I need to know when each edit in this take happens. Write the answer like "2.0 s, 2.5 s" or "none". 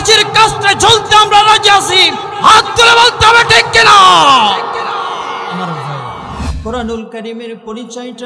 6.5 s